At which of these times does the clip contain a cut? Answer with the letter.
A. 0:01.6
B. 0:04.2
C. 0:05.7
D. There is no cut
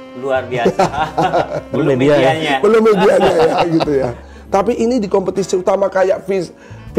B